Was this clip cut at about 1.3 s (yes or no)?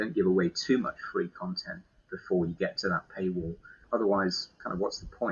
no